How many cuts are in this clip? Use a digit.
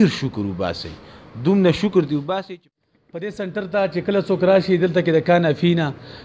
1